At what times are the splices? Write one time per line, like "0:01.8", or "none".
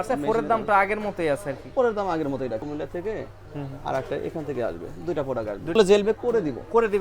0:02.7
0:05.8